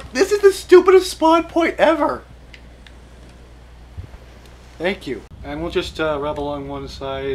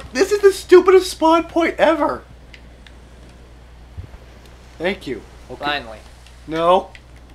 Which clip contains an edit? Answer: first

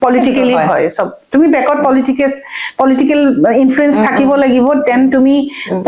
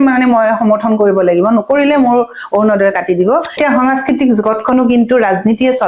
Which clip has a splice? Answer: second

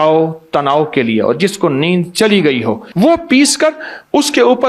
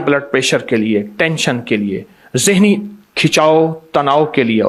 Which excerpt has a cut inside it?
first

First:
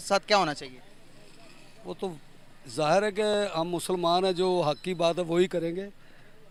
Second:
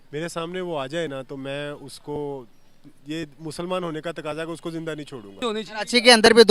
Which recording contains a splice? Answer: second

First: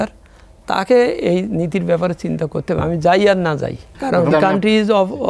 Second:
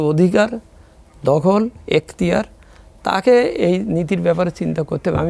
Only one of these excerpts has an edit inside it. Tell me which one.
first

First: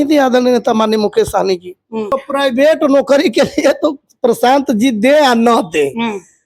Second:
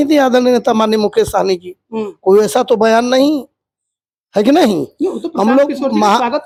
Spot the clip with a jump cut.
first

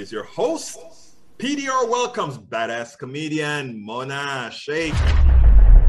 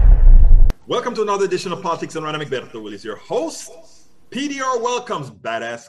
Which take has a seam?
first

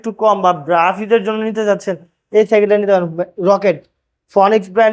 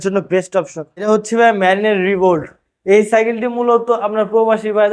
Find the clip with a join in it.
second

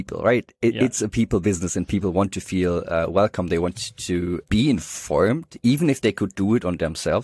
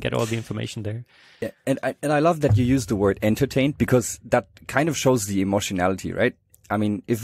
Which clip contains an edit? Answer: first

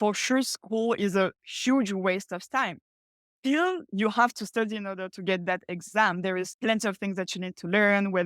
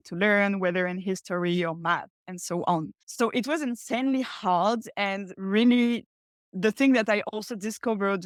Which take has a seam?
first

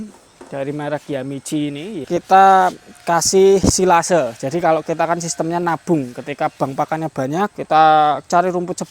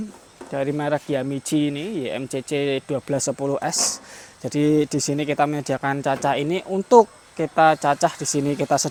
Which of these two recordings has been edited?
first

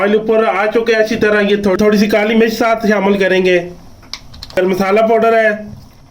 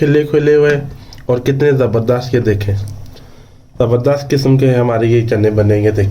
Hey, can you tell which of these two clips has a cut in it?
first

